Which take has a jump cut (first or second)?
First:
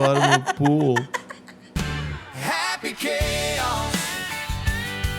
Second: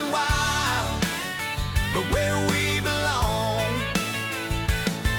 first